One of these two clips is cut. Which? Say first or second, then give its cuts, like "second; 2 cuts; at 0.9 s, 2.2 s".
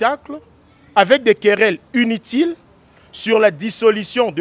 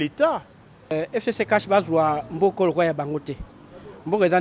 second; 1 cut; at 0.9 s